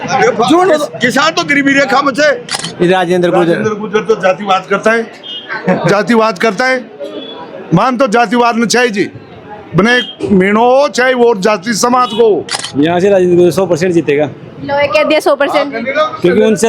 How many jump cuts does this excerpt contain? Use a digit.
2